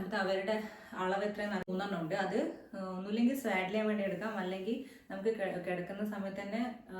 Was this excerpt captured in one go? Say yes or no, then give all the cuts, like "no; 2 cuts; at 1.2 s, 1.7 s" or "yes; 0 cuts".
no; 1 cut; at 1.7 s